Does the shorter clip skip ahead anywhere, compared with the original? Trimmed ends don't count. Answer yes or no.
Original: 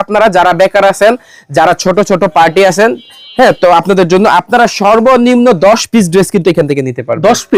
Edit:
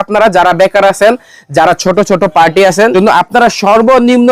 yes